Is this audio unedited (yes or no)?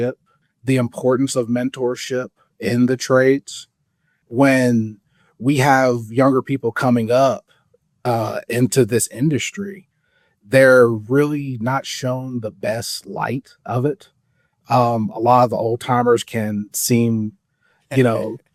yes